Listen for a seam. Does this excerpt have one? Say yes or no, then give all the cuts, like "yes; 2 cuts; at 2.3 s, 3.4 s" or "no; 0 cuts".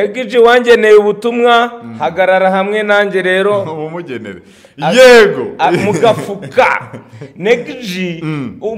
no; 0 cuts